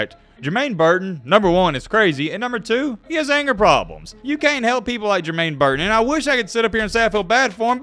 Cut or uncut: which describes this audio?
cut